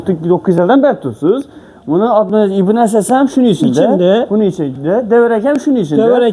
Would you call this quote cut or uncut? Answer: uncut